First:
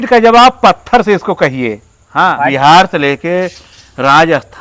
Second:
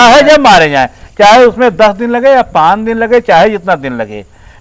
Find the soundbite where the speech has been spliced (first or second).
first